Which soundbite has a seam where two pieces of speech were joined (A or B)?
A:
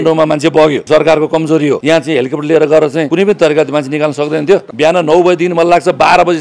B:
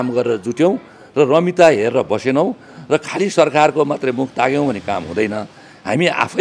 A